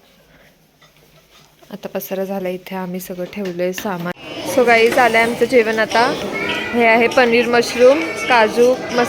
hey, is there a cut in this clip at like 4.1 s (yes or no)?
yes